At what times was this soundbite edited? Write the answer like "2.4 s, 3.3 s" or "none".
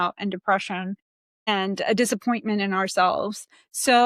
none